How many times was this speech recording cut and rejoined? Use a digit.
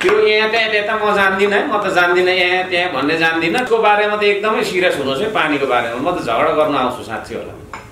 1